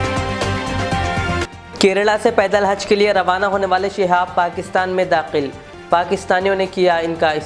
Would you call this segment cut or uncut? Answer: cut